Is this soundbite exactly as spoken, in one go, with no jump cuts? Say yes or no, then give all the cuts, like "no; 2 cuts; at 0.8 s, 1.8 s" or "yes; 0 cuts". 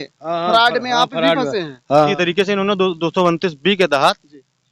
no; 1 cut; at 2.1 s